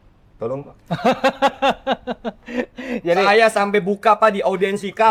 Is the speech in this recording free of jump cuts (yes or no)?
yes